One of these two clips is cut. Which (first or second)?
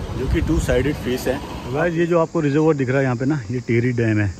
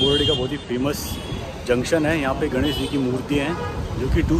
first